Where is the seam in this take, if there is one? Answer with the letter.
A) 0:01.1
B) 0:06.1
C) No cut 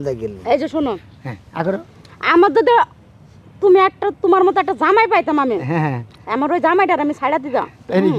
C